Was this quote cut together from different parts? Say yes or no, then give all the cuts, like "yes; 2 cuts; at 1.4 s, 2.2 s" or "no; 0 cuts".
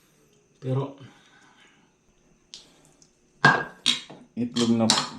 yes; 1 cut; at 2.1 s